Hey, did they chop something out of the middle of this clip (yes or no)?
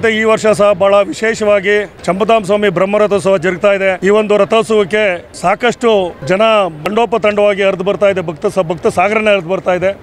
yes